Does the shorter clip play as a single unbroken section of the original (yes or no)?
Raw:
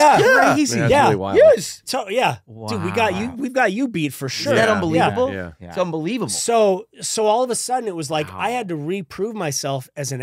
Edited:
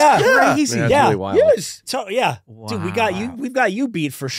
yes